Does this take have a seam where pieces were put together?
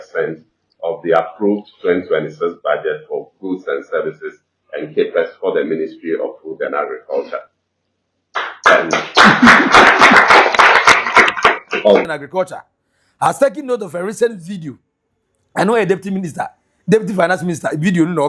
yes; 1 cut; at 12.0 s

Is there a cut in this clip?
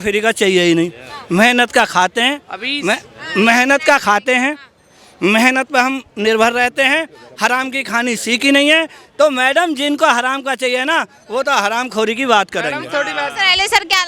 no; 0 cuts

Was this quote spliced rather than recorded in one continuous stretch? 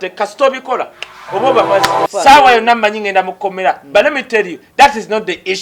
yes; 1 cut; at 2.0 s

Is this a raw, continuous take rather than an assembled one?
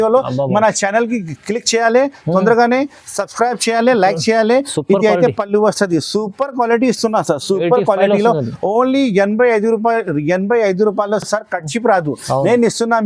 yes; 0 cuts

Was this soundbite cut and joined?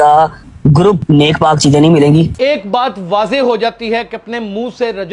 yes; 2 cuts; at 1.0 s, 2.3 s

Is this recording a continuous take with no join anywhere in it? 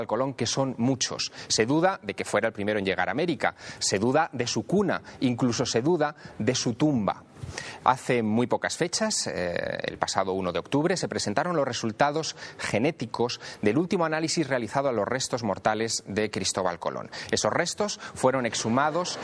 no; 1 cut; at 10.2 s

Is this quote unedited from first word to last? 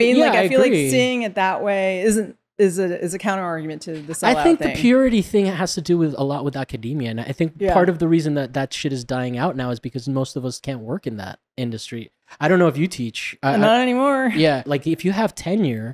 no; 2 cuts; at 12.2 s, 14.7 s

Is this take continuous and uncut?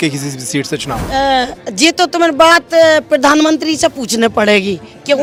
yes; 0 cuts

